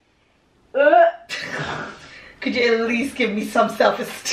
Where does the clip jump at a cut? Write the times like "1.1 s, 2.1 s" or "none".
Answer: none